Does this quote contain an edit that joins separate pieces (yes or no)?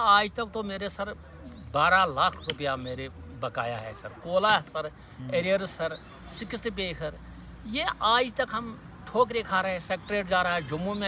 no